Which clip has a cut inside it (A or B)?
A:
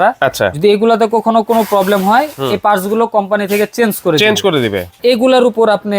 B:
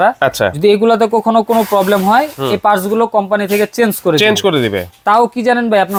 A